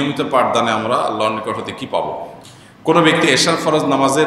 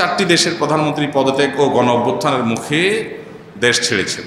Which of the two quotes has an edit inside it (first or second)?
first